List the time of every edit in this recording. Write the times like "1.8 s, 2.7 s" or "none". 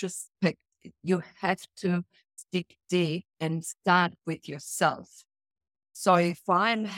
2.4 s